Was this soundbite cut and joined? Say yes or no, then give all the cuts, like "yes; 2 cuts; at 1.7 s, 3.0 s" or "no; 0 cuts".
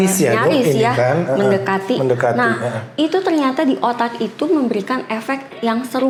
no; 0 cuts